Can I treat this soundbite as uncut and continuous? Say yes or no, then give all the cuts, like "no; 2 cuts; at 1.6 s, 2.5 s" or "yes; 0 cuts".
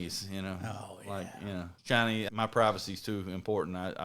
no; 1 cut; at 2.3 s